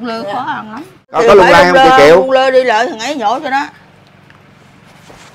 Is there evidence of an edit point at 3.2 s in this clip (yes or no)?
no